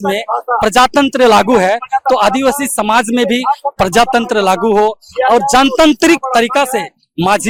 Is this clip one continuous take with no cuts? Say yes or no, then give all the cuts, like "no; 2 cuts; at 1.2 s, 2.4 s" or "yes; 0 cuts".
yes; 0 cuts